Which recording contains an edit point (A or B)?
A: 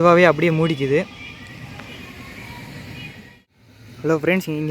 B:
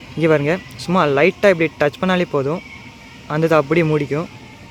A